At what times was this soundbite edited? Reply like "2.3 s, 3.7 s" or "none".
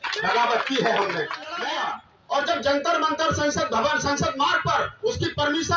1.6 s

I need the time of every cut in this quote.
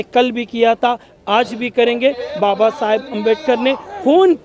none

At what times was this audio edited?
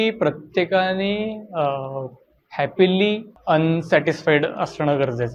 3.3 s

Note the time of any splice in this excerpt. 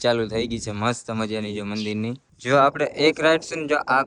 2.3 s

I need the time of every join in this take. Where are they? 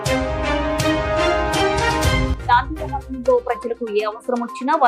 2.3 s

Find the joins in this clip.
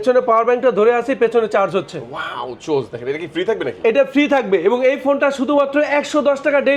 none

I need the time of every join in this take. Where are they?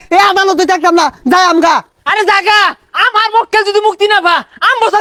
none

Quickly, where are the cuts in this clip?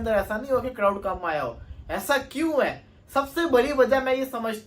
none

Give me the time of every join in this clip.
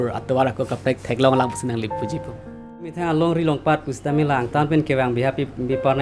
2.9 s

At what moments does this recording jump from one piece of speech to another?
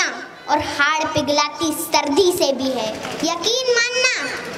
3.1 s

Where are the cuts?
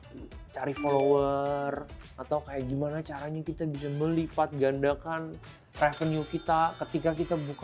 none

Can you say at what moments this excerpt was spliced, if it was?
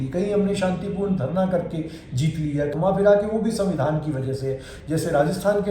2.7 s, 4.7 s

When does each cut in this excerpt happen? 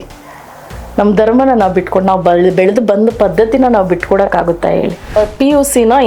5.2 s

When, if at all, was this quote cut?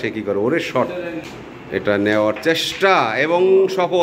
1.3 s

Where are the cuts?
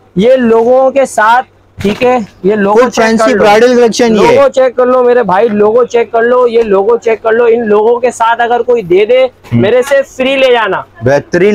none

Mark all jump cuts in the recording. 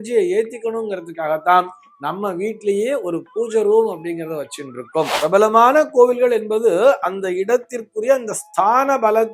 5.1 s

